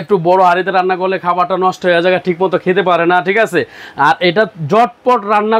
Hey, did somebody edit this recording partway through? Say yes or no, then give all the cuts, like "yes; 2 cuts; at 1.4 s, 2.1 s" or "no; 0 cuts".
no; 0 cuts